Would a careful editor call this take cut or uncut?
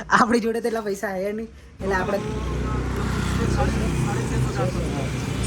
cut